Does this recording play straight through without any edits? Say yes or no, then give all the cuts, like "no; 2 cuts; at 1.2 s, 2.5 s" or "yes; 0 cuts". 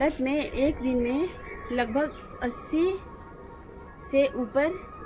yes; 0 cuts